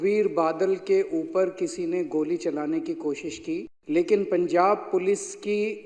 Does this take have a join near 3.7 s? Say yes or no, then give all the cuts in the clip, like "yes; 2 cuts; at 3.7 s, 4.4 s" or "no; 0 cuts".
yes; 1 cut; at 3.7 s